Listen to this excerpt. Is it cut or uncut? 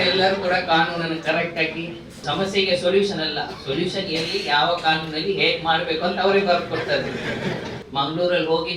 cut